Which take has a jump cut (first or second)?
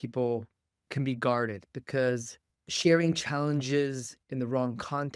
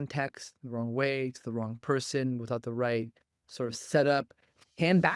first